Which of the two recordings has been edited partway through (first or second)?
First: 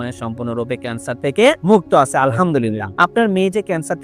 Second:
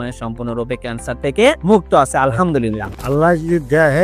second